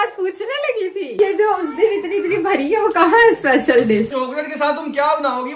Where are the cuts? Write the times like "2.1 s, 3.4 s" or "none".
1.1 s, 4.1 s

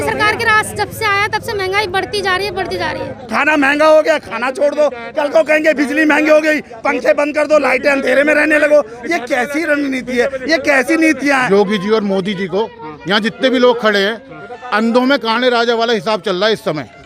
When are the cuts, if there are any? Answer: 3.2 s, 11.4 s

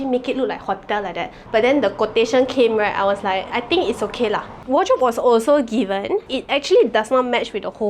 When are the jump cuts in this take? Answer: 1.3 s, 4.6 s, 6.3 s

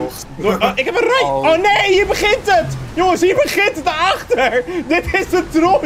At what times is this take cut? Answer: none

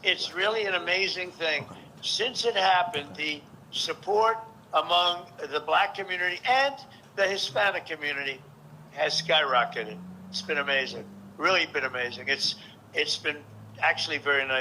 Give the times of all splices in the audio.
none

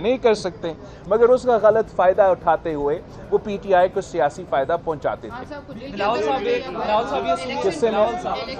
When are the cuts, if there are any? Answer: none

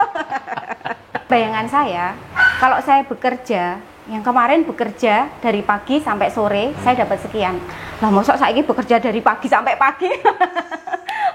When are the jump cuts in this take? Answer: 1.2 s

